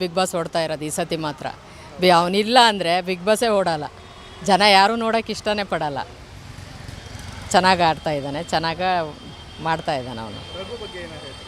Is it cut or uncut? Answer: uncut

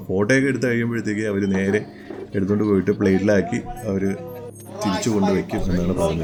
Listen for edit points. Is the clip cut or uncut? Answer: uncut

